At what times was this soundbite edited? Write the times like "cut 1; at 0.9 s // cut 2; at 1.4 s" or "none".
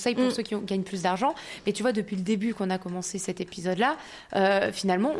none